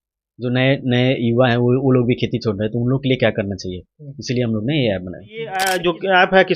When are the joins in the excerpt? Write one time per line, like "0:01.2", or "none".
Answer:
0:05.6